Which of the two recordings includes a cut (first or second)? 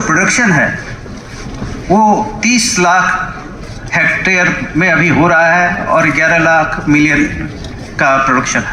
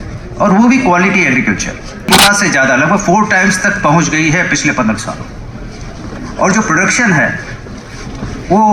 second